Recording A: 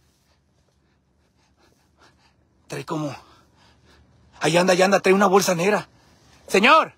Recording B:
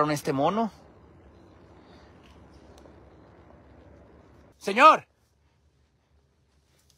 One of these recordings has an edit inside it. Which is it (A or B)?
B